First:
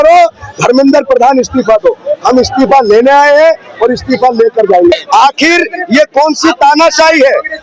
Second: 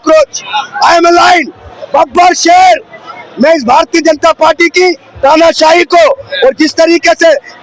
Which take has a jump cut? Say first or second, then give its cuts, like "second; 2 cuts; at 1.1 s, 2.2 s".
first; 1 cut; at 4.9 s